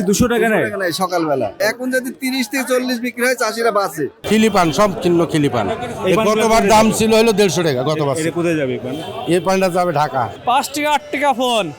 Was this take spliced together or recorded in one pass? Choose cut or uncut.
cut